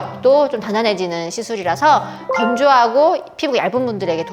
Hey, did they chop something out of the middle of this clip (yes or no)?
no